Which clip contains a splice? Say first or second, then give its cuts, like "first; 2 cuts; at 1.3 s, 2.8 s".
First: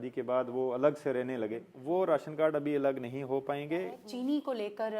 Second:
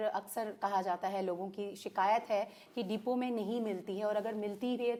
first; 2 cuts; at 1.7 s, 4.0 s